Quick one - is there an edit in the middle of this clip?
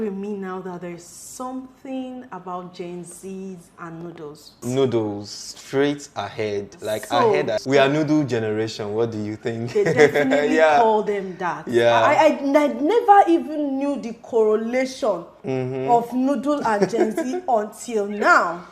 yes; 2 cuts; at 4.6 s, 7.6 s

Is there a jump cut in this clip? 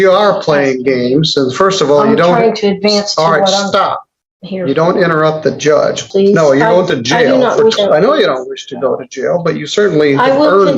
yes; 2 cuts; at 6.0 s, 7.8 s

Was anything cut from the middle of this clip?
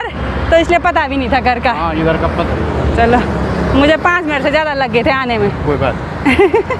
no; 0 cuts

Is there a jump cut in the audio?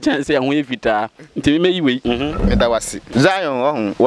yes; 2 cuts; at 2.0 s, 3.0 s

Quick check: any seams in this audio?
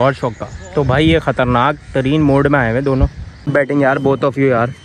yes; 1 cut; at 3.3 s

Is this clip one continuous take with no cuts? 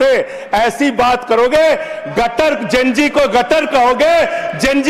yes; 0 cuts

